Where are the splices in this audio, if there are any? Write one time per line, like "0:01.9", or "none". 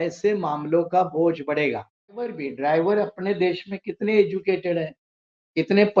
0:02.4